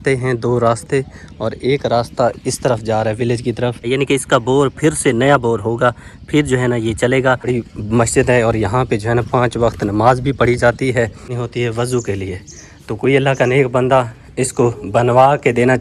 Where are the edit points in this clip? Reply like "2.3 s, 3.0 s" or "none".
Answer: 3.9 s, 7.5 s, 11.4 s